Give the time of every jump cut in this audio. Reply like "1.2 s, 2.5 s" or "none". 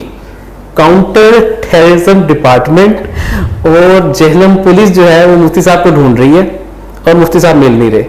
none